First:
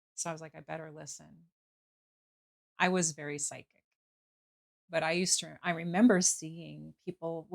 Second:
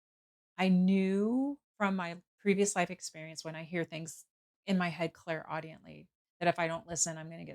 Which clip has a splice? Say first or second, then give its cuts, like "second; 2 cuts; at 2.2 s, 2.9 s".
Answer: first; 2 cuts; at 2.0 s, 4.7 s